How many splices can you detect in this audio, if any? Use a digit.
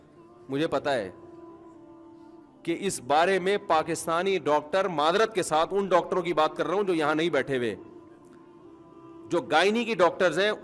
2